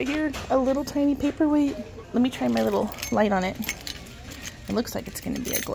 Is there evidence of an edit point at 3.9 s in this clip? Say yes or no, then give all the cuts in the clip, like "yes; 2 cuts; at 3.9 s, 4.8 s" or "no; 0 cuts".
no; 1 cut; at 2.0 s